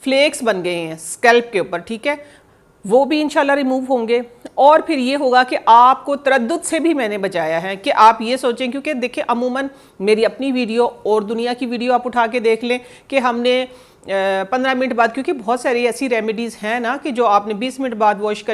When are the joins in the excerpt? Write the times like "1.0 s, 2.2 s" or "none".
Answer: none